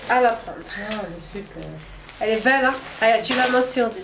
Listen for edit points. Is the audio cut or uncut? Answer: uncut